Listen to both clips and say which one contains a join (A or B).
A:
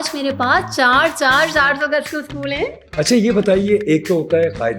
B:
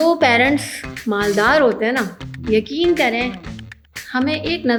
A